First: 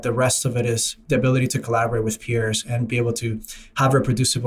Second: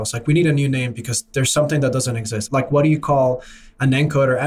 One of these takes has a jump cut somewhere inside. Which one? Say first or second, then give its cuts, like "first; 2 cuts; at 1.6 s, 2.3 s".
second; 1 cut; at 2.4 s